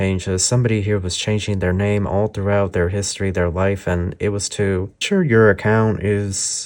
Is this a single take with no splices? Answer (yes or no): no